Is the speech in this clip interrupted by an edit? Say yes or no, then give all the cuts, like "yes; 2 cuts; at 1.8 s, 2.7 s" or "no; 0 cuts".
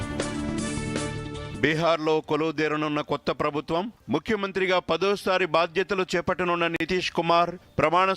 yes; 1 cut; at 1.5 s